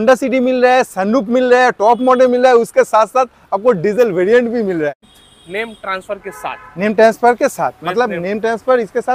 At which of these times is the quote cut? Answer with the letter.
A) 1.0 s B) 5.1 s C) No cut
B